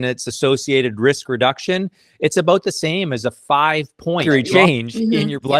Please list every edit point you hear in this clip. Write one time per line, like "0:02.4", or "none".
none